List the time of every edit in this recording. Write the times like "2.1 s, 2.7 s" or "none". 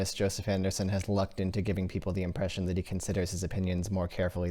none